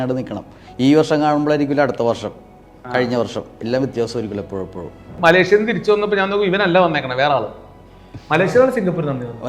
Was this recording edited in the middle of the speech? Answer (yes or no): yes